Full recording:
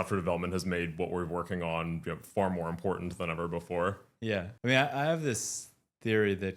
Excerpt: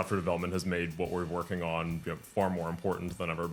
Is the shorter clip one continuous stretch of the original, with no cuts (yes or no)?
yes